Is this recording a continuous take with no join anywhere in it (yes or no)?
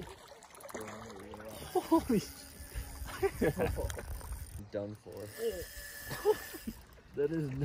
no